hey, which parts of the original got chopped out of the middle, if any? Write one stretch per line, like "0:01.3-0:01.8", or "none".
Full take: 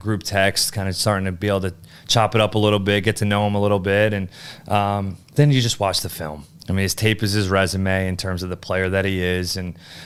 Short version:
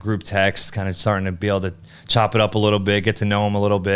none